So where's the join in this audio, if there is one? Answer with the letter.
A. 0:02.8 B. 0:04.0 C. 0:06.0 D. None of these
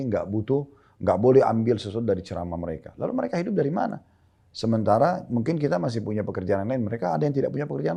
D